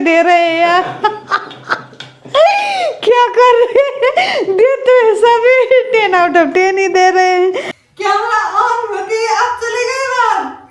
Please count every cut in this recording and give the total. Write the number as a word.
one